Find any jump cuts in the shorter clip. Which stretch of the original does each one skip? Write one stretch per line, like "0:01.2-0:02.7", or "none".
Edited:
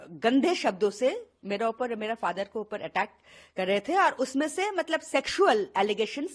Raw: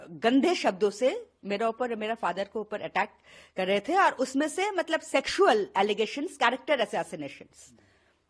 none